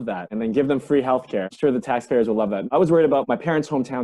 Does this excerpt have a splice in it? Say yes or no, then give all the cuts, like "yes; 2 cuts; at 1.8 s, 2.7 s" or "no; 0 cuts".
yes; 1 cut; at 2.6 s